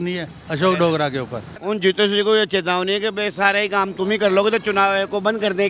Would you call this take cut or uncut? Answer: cut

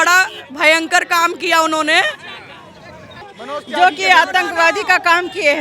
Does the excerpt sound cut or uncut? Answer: cut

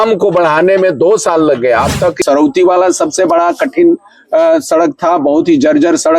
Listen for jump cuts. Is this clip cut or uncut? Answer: cut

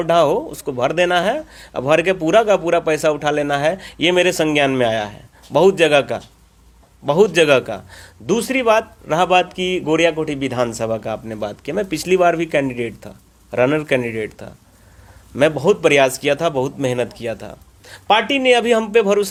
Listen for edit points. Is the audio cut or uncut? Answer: uncut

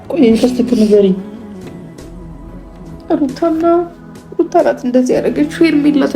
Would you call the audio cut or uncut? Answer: cut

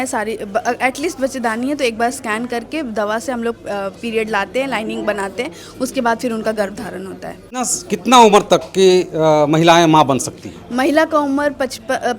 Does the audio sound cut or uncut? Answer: cut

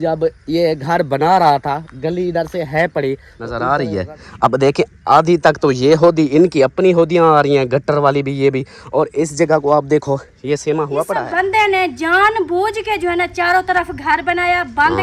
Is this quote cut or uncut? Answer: cut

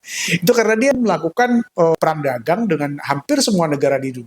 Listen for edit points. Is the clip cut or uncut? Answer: cut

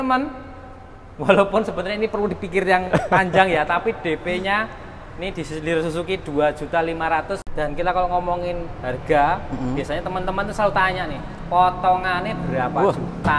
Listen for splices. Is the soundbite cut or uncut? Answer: cut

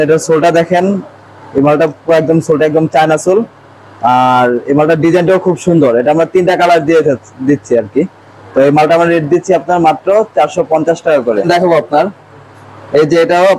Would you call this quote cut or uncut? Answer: uncut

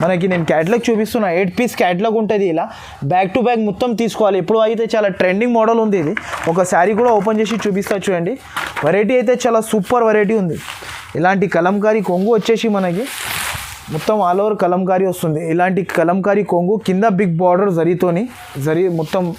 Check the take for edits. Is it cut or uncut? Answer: uncut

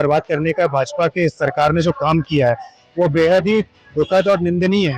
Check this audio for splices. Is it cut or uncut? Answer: uncut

